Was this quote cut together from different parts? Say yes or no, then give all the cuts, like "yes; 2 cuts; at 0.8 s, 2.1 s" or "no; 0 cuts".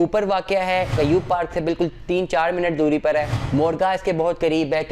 yes; 2 cuts; at 0.9 s, 3.4 s